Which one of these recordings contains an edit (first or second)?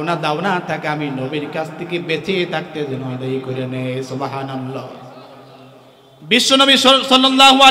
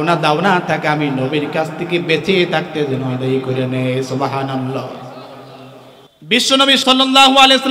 second